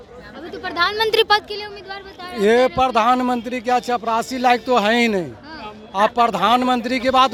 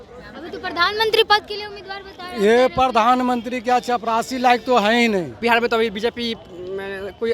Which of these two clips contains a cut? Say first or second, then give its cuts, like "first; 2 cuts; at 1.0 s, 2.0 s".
second; 1 cut; at 5.4 s